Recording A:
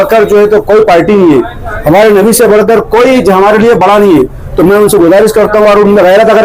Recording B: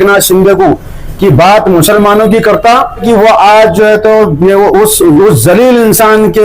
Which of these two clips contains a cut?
B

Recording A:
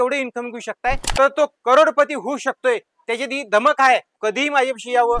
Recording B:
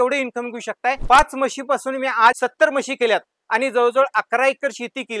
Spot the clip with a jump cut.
A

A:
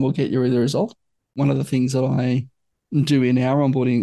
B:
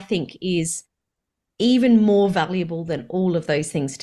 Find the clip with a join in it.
A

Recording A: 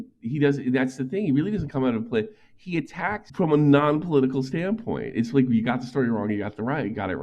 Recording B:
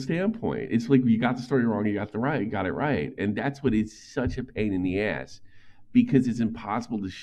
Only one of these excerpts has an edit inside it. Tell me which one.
A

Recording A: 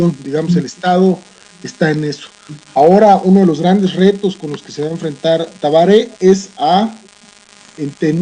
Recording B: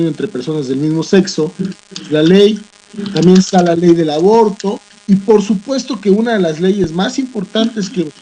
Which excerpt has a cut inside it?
B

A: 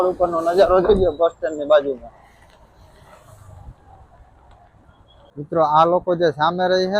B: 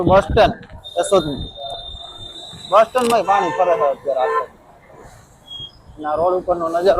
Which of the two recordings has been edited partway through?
A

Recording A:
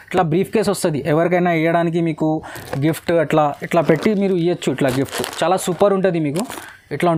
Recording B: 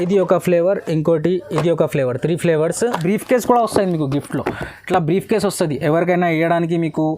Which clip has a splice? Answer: B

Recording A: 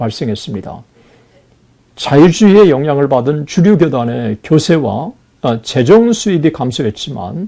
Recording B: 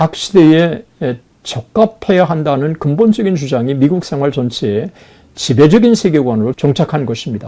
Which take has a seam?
B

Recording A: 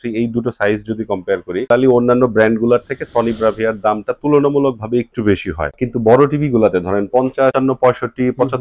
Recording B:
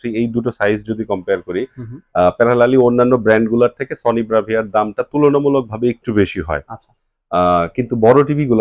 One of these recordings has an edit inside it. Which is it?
A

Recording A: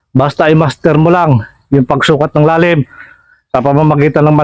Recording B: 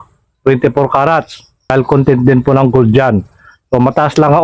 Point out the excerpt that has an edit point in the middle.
B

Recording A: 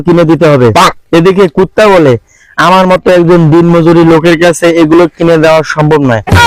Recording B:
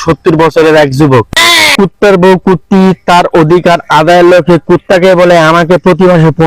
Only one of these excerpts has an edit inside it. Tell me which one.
B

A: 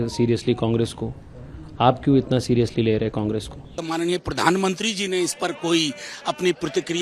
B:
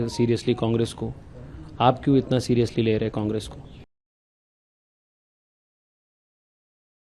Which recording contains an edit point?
A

